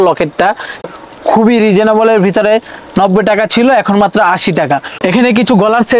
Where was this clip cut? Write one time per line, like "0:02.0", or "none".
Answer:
0:00.9
0:04.8